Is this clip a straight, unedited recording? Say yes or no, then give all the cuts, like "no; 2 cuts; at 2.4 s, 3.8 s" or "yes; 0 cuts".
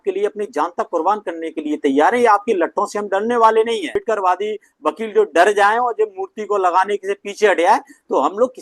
no; 1 cut; at 3.9 s